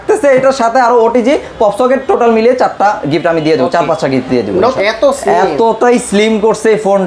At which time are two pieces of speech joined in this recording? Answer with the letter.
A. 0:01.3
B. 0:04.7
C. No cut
B